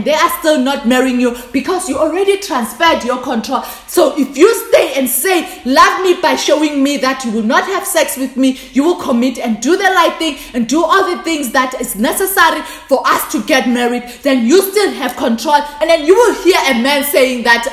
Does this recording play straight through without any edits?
no; 1 cut; at 15.7 s

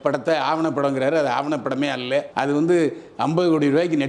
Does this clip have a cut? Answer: no; 0 cuts

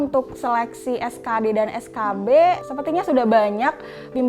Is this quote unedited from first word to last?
no; 1 cut; at 2.7 s

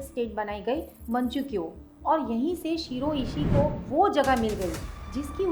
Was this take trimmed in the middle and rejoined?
no; 0 cuts

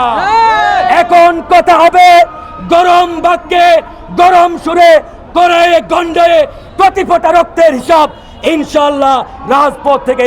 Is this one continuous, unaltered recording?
yes; 0 cuts

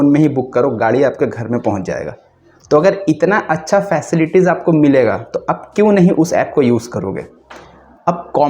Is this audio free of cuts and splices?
yes; 0 cuts

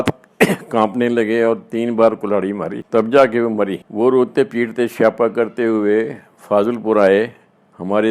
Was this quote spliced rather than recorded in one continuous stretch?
no; 0 cuts

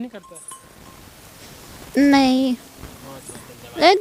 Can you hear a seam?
no; 0 cuts

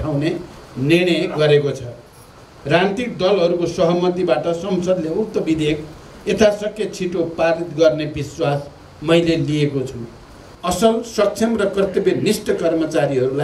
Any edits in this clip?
yes; 1 cut; at 10.5 s

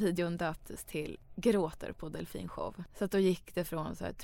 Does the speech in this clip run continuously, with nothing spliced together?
no; 2 cuts; at 1.2 s, 2.8 s

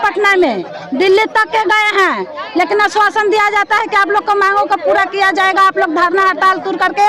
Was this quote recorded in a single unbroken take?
yes; 0 cuts

